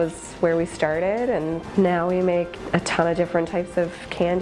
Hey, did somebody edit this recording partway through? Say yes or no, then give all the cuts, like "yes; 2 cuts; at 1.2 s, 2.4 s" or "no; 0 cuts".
yes; 2 cuts; at 1.6 s, 2.6 s